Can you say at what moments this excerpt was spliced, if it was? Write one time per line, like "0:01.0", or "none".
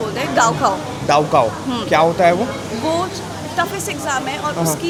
none